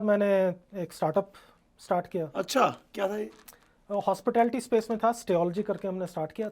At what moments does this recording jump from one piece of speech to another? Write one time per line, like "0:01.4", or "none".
none